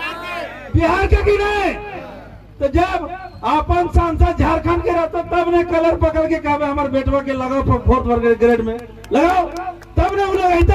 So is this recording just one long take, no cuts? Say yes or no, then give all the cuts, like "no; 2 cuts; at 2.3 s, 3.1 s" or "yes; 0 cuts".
yes; 0 cuts